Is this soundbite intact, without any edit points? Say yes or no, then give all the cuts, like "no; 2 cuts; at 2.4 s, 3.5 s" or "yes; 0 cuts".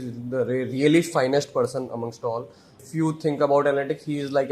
no; 1 cut; at 2.8 s